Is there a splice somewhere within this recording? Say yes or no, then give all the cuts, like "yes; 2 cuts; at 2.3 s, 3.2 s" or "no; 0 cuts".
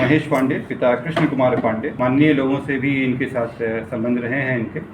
yes; 1 cut; at 1.9 s